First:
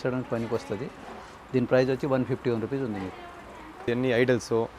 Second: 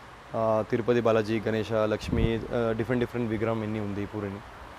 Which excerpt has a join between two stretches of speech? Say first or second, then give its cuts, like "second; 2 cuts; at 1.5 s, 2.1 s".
first; 1 cut; at 3.8 s